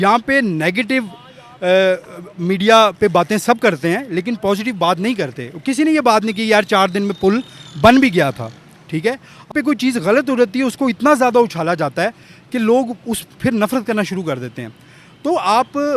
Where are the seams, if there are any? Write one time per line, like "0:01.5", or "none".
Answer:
0:09.5